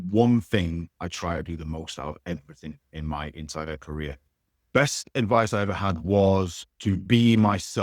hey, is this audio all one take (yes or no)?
no